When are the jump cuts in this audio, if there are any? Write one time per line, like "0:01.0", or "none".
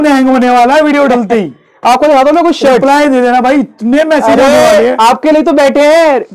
none